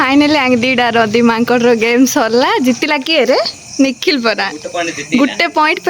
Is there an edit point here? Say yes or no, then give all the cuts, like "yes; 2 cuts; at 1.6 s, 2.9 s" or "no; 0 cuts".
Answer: no; 0 cuts